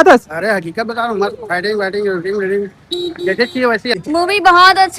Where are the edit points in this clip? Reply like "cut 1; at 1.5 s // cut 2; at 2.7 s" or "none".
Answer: cut 1; at 4.0 s